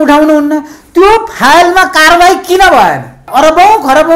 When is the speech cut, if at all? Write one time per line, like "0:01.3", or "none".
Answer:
0:03.3